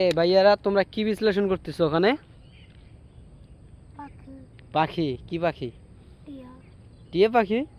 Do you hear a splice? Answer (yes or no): no